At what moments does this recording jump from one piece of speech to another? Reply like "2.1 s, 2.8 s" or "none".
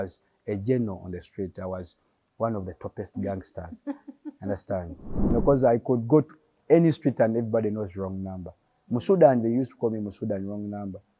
5.3 s